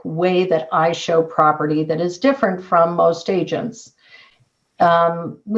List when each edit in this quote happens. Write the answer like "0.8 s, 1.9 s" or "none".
none